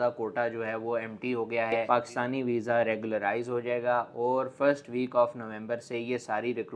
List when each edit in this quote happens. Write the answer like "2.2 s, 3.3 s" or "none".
1.8 s